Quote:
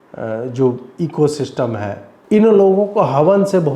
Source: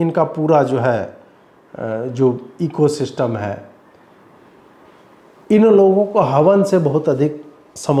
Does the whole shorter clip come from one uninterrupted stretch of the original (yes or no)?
no